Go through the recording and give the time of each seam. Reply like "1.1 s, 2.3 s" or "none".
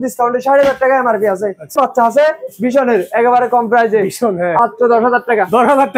1.7 s, 4.6 s